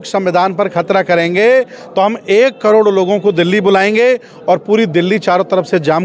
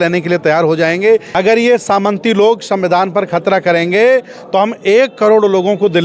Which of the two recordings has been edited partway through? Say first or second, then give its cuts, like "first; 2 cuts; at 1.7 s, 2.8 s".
second; 1 cut; at 1.3 s